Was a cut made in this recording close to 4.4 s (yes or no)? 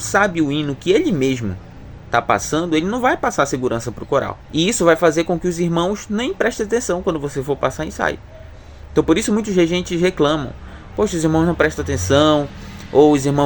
yes